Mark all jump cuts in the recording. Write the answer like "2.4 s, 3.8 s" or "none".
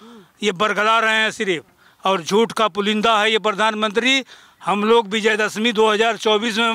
none

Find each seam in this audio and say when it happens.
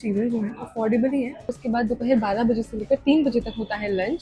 1.5 s

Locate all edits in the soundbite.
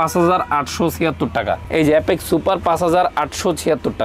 none

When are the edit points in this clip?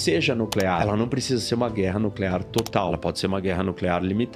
0.8 s, 2.9 s

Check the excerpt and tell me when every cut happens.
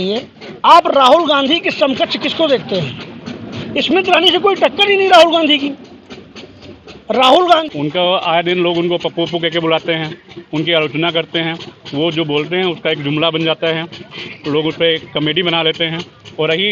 7.6 s

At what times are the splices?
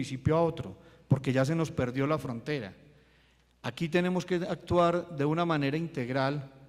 none

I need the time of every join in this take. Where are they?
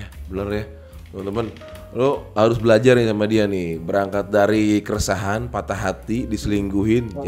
none

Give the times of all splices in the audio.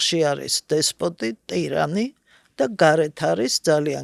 none

